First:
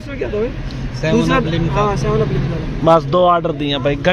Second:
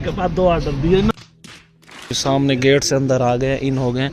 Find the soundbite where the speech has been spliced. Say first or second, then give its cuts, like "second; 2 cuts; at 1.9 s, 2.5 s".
second; 1 cut; at 1.9 s